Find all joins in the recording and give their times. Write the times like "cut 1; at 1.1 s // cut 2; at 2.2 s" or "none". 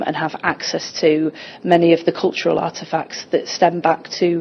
none